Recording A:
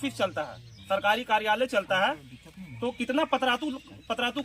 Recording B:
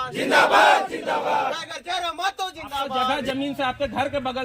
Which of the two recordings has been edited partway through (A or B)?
B